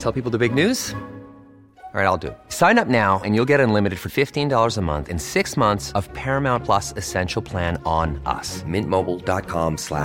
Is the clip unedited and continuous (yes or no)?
yes